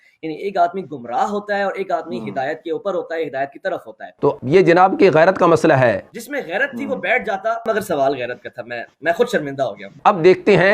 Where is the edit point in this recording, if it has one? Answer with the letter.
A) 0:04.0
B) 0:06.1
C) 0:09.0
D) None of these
A